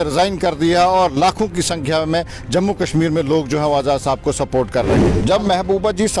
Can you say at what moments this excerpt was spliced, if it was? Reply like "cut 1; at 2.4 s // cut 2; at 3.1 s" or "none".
cut 1; at 5.1 s